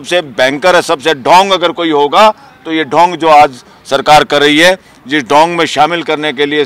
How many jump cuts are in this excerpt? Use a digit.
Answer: 0